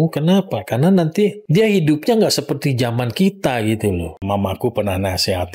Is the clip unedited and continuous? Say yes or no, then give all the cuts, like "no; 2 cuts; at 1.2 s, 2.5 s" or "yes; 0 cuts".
no; 2 cuts; at 1.4 s, 4.0 s